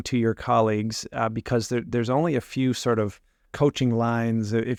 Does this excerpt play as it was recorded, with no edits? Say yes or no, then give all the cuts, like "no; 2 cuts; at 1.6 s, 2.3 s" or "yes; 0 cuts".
yes; 0 cuts